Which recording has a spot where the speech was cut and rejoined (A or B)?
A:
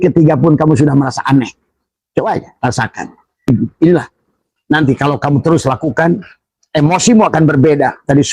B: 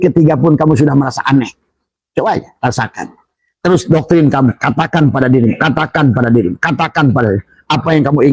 A